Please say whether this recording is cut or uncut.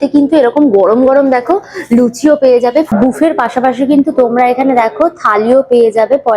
cut